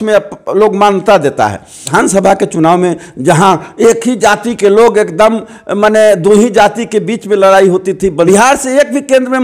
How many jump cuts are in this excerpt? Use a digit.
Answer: 2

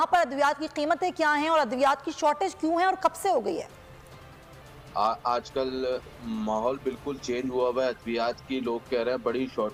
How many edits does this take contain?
0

